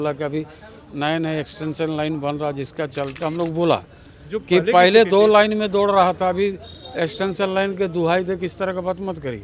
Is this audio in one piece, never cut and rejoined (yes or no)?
no